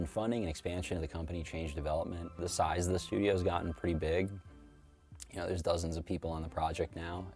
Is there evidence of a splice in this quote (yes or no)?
yes